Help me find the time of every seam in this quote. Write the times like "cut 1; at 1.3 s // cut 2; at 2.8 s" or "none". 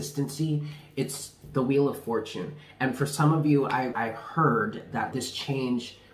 cut 1; at 3.9 s // cut 2; at 5.1 s